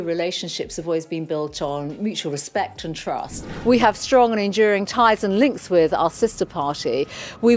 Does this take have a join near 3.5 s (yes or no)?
yes